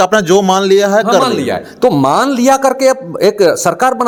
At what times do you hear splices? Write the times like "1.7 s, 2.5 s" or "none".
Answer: none